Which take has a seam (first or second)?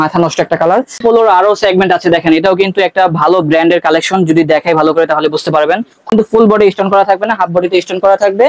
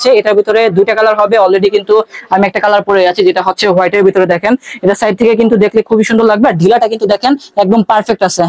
first